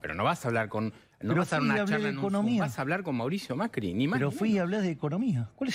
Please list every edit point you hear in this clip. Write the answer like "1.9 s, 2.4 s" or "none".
none